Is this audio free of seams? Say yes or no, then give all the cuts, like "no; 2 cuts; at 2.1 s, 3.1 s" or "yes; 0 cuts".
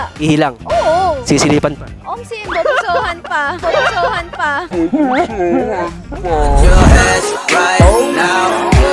yes; 0 cuts